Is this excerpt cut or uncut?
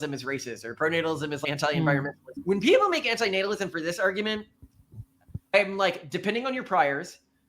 cut